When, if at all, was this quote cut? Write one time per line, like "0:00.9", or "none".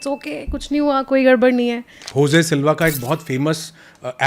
0:02.0